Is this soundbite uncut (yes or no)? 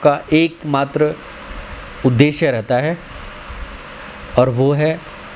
yes